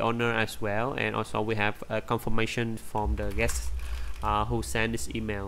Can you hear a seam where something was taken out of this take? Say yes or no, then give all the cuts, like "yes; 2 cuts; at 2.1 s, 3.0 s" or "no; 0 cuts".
no; 0 cuts